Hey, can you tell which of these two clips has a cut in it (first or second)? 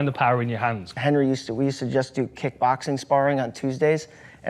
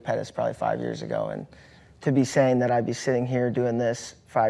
first